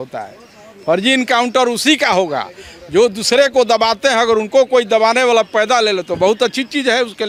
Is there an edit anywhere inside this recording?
no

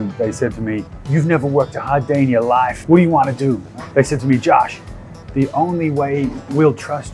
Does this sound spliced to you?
yes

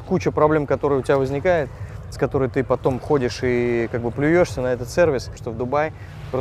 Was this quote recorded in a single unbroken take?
no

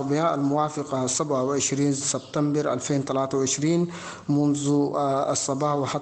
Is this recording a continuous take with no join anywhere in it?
yes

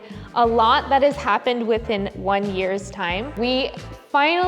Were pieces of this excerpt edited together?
yes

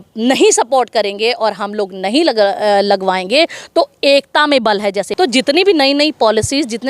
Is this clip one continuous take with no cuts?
no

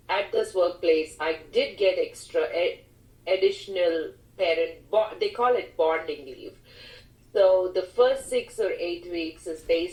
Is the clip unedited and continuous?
yes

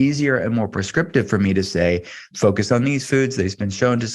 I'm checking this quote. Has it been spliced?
yes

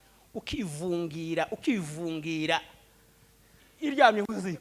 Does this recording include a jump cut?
yes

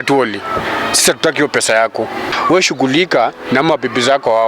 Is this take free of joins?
no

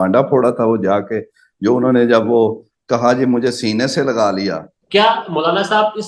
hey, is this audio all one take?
no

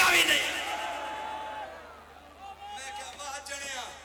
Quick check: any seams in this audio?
no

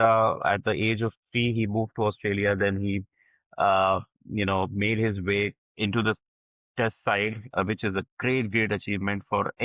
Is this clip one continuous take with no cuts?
yes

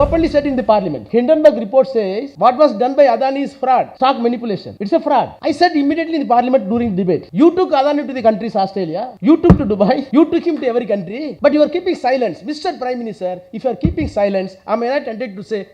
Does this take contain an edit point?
yes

